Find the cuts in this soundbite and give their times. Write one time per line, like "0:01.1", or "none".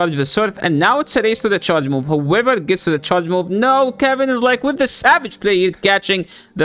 none